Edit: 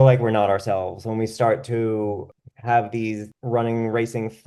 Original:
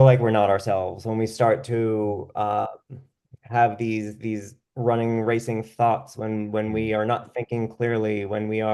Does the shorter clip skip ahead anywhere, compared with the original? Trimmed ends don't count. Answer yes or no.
yes